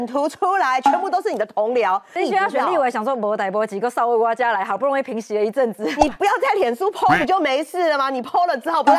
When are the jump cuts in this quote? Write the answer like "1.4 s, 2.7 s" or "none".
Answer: 2.1 s